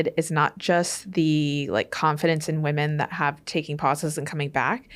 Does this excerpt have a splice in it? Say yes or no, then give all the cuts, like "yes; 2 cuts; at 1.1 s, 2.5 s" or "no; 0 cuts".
no; 0 cuts